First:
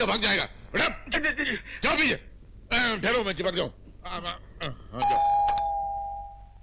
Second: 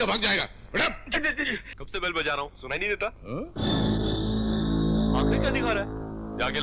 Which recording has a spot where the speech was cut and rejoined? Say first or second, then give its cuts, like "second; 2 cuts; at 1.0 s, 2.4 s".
second; 1 cut; at 1.7 s